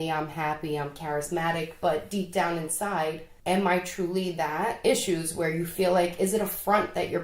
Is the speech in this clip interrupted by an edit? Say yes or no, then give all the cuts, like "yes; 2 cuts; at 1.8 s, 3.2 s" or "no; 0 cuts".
yes; 2 cuts; at 3.3 s, 4.8 s